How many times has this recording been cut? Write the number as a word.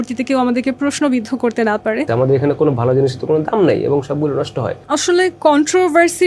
two